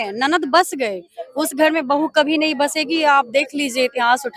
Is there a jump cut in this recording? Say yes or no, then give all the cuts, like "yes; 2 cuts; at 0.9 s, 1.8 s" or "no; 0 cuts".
no; 0 cuts